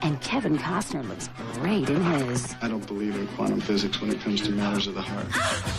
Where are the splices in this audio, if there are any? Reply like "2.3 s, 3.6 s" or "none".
none